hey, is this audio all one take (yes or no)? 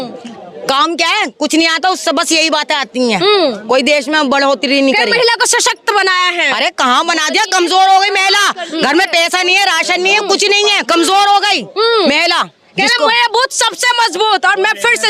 yes